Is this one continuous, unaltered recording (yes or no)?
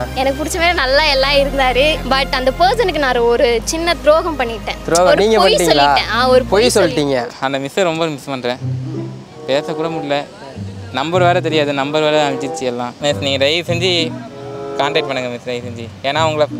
no